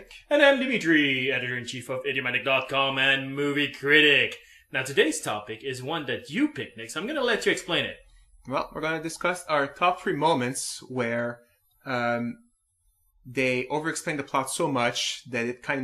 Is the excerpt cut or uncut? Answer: uncut